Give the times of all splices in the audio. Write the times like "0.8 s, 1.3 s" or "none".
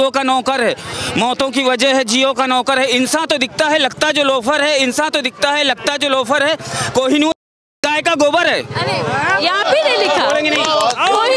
none